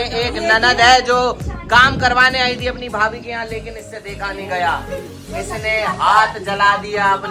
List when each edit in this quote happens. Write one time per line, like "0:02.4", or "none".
none

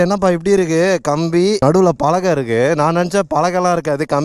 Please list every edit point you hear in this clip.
0:01.6

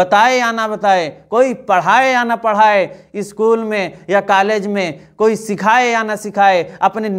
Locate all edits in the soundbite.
none

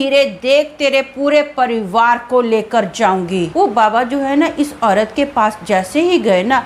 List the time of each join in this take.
0:03.5

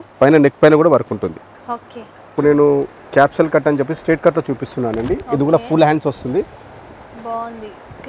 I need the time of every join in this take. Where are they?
0:02.2

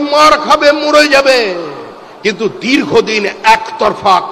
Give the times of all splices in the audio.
none

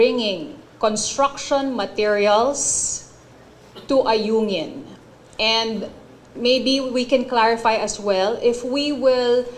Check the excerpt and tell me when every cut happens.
none

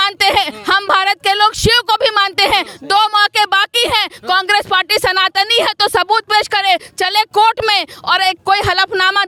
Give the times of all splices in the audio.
none

